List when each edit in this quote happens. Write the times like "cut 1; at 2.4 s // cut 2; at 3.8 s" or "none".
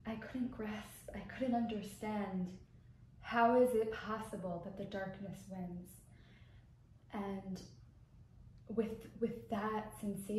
none